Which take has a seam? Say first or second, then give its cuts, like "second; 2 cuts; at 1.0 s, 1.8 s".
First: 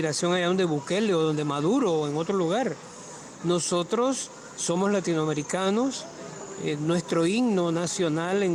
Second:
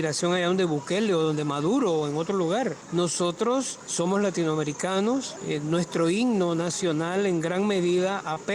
second; 3 cuts; at 2.8 s, 3.8 s, 5.3 s